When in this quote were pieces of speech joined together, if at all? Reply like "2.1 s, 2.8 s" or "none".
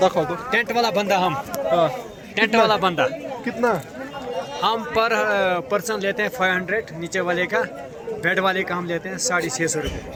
none